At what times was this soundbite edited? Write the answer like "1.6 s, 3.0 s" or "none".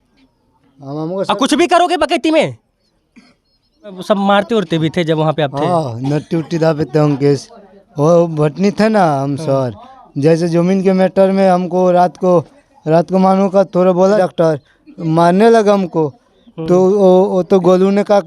4.0 s, 14.2 s